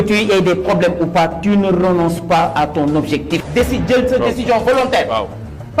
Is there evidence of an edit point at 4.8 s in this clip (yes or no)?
no